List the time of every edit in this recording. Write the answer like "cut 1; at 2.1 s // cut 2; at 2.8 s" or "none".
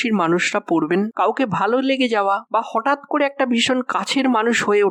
none